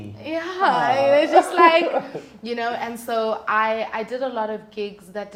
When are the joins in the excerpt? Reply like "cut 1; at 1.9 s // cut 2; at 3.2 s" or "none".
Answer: none